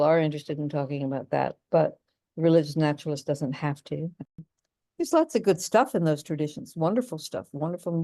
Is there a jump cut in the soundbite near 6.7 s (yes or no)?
no